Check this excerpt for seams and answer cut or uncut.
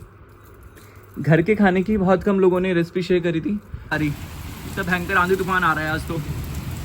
cut